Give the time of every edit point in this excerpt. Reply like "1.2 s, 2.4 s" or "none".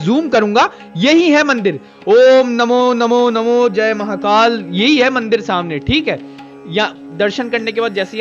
none